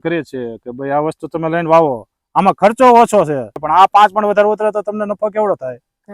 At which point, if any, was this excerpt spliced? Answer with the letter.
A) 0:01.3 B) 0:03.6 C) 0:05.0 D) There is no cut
B